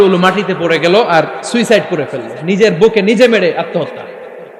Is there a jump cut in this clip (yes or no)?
no